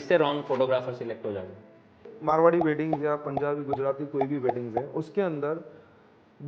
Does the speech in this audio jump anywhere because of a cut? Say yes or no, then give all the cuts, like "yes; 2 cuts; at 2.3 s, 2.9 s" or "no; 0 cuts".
yes; 1 cut; at 2.1 s